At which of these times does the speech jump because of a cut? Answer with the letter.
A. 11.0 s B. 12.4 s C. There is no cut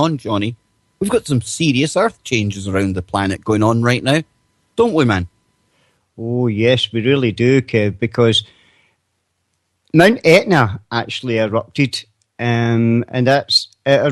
C